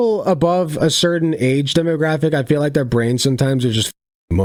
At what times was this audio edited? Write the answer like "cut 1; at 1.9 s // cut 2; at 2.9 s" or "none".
none